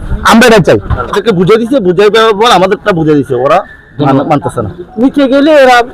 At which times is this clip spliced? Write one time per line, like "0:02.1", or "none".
0:01.1
0:04.8